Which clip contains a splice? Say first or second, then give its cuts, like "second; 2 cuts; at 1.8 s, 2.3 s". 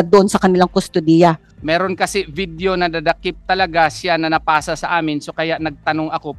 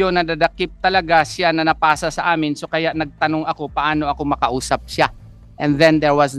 first; 1 cut; at 1.5 s